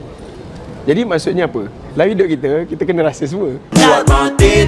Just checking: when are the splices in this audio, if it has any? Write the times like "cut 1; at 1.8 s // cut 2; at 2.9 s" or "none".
cut 1; at 3.7 s